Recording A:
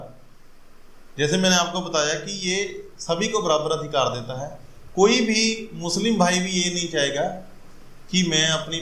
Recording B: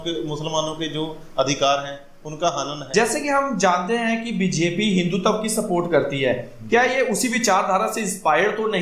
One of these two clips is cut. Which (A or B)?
B